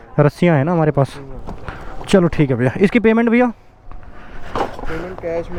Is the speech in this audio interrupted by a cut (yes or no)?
no